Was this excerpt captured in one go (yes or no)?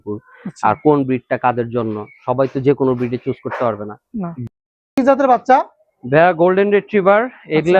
no